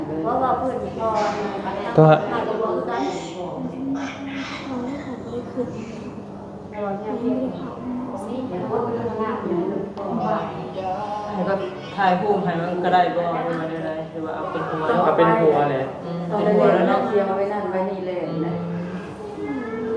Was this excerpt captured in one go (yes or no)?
yes